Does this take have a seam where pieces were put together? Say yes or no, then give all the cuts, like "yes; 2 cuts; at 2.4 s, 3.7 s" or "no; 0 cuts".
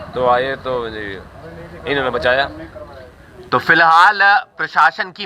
yes; 1 cut; at 3.3 s